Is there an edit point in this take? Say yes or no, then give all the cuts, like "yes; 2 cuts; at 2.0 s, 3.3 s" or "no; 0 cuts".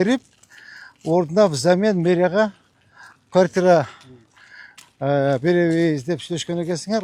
no; 0 cuts